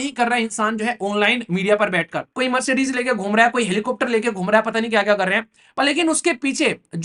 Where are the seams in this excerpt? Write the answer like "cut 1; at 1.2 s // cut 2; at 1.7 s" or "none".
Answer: cut 1; at 2.2 s